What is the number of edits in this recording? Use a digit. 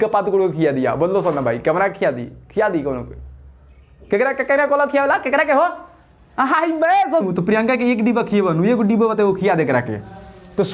1